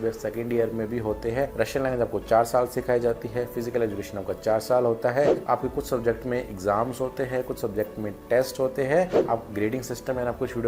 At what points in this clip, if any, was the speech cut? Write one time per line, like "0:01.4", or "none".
0:01.5
0:05.4
0:09.2

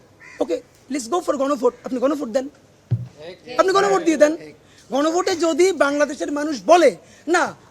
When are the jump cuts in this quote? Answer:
none

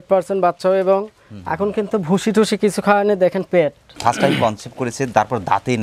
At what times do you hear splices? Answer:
0:03.8

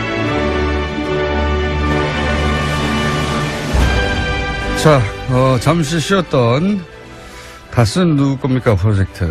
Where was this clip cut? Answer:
0:05.4

